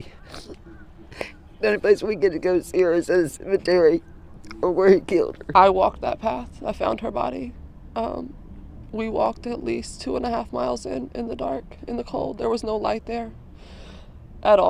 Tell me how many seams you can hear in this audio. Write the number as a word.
one